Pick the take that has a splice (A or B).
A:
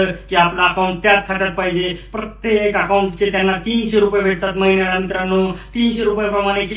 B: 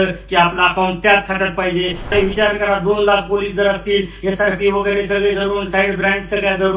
B